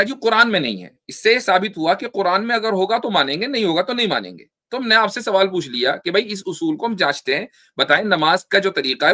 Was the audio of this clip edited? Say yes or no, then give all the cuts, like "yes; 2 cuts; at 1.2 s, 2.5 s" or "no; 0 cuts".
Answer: no; 0 cuts